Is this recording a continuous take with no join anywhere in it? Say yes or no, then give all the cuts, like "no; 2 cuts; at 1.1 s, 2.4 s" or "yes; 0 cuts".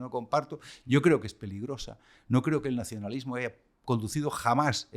yes; 0 cuts